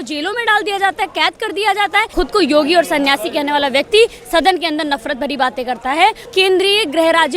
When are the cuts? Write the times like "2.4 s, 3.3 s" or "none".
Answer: 2.1 s, 6.3 s